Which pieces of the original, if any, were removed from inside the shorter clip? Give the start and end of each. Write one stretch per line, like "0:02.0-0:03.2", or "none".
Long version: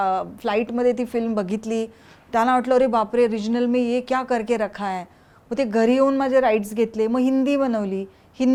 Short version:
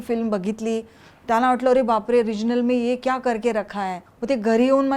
0:05.1-0:05.3

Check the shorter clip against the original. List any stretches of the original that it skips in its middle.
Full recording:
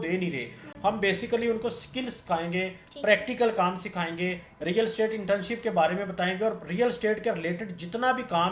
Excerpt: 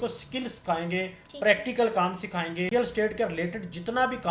0:04.3-0:06.8

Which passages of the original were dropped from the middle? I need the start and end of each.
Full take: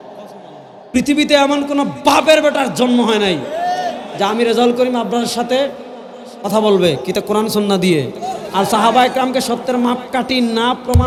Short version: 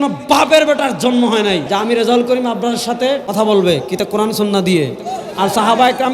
0:03.4-0:04.1
0:05.7-0:06.4

